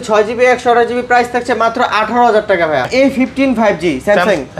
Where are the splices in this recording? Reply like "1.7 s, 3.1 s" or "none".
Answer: 2.9 s